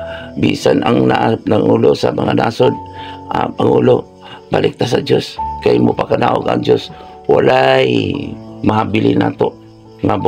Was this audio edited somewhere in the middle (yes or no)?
no